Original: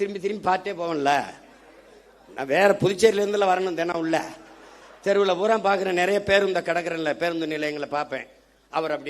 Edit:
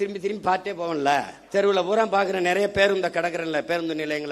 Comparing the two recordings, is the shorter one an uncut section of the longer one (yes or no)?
no